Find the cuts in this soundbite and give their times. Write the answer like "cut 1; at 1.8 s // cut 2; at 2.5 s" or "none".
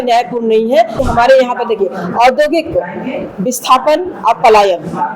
cut 1; at 1.0 s